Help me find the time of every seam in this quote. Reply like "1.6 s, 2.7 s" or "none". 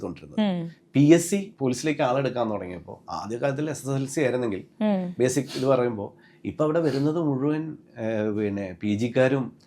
1.5 s

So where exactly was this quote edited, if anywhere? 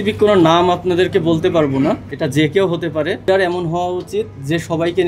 2.0 s, 3.2 s

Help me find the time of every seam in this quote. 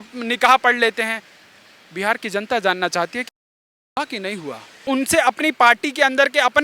4.9 s

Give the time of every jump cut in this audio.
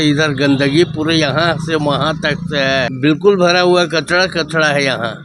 2.9 s

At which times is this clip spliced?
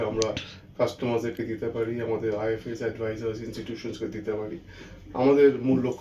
none

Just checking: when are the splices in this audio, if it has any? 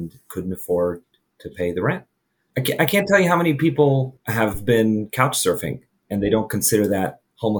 2.5 s, 4.2 s

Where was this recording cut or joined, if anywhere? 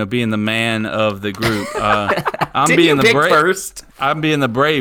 none

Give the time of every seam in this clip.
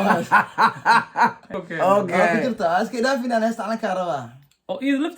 1.6 s

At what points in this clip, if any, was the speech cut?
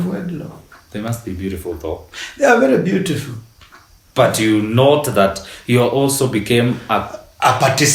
none

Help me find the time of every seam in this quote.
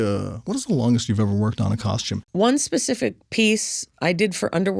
2.2 s

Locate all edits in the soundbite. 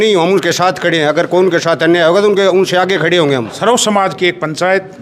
3.5 s

